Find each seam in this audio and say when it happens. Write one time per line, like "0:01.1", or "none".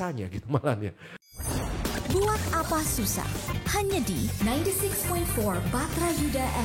0:01.2